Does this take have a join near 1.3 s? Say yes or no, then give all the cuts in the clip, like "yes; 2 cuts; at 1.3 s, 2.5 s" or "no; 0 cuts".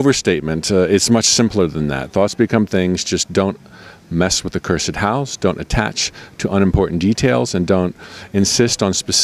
yes; 1 cut; at 1.3 s